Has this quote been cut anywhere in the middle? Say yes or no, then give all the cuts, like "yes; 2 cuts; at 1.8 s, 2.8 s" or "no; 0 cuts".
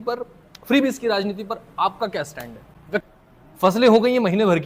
yes; 1 cut; at 3.0 s